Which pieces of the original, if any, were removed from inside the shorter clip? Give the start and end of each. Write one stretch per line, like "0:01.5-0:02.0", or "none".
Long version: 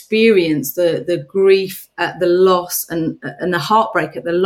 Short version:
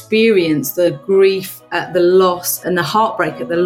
0:00.9-0:01.2
0:02.8-0:03.3